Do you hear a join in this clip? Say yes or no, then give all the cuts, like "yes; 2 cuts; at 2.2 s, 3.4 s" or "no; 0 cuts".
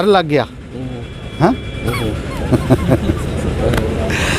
no; 0 cuts